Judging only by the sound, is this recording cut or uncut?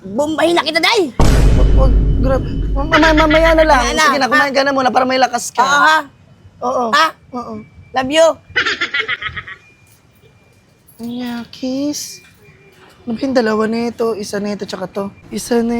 uncut